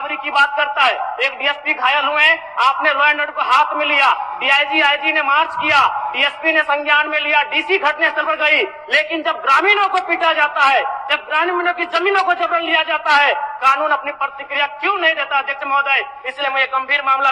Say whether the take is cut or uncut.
uncut